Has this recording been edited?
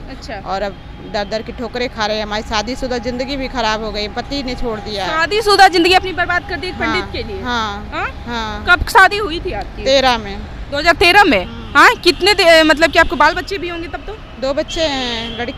no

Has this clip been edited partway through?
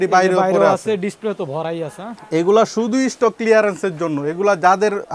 no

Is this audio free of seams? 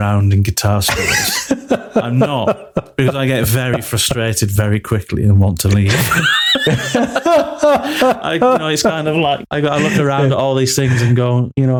yes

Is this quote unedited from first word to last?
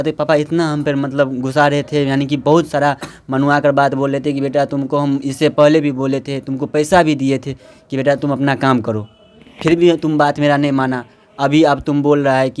yes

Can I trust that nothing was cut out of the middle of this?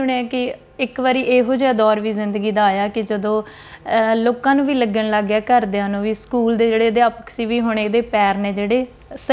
yes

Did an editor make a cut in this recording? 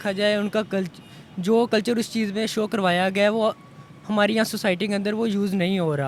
no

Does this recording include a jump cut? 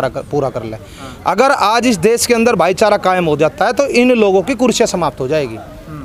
no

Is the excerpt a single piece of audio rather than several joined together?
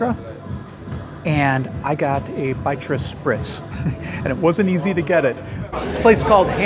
no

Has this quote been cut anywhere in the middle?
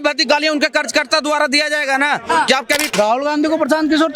yes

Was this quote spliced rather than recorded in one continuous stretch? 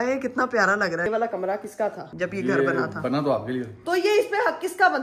yes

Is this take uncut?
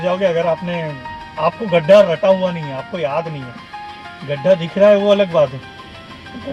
yes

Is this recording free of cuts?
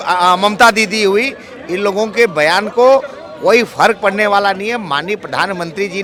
yes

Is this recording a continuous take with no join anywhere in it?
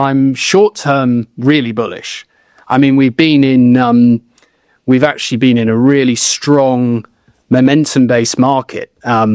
yes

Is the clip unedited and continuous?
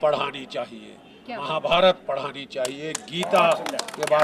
yes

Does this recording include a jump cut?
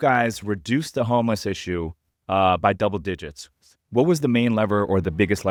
no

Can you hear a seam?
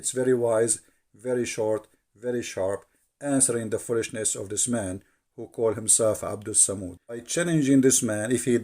yes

